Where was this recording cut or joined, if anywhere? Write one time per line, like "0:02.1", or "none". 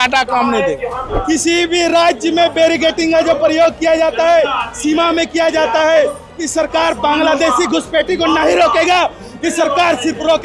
0:01.1